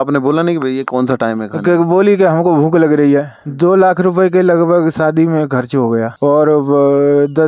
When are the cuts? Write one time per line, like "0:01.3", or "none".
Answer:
0:03.4